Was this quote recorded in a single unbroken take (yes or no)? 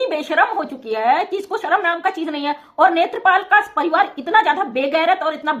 yes